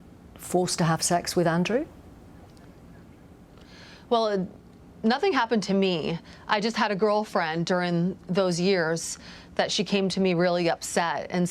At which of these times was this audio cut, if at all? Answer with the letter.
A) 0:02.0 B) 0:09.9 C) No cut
C